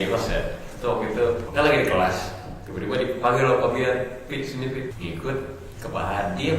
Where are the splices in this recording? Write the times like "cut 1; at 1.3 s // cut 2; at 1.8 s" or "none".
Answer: cut 1; at 1.5 s // cut 2; at 5.0 s